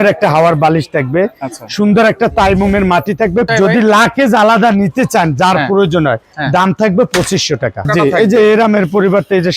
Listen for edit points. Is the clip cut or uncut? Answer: cut